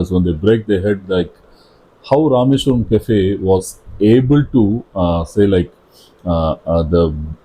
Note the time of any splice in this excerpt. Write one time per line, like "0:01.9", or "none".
none